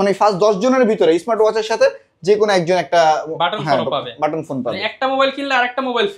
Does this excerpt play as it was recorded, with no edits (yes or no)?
yes